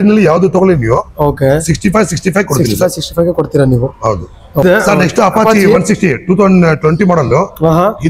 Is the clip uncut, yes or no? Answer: yes